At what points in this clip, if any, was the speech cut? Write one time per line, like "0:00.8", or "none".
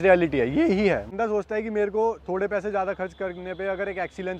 0:01.1